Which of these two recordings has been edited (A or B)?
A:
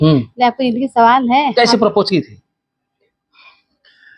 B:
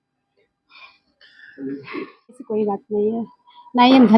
B